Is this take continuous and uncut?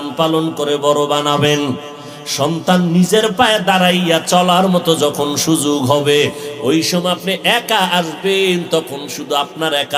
yes; 0 cuts

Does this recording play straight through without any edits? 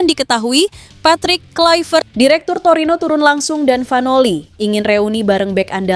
no; 1 cut; at 2.1 s

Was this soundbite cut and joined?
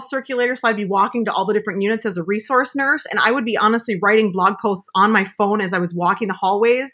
no; 0 cuts

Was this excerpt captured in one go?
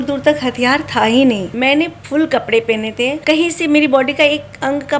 no; 2 cuts; at 1.5 s, 3.2 s

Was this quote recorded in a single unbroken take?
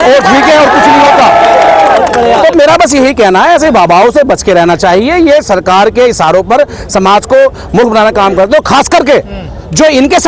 yes; 0 cuts

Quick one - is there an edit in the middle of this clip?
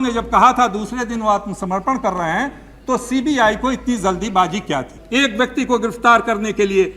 yes; 1 cut; at 5.0 s

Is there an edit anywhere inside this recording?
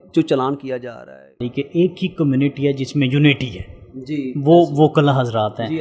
yes; 1 cut; at 1.3 s

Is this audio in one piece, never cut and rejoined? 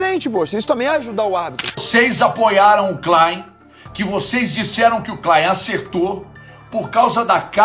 no; 1 cut; at 1.8 s

